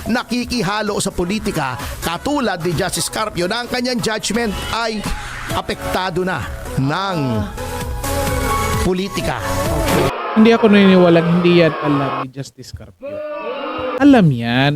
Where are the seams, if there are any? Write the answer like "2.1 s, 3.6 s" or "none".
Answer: 10.1 s